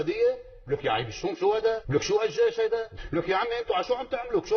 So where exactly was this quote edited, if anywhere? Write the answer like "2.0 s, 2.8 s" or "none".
1.8 s, 2.9 s